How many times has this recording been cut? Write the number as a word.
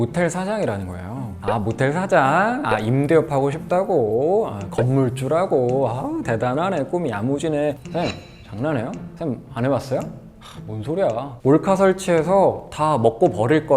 two